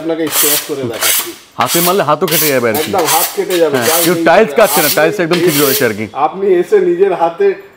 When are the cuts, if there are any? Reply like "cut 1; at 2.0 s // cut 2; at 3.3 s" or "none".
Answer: none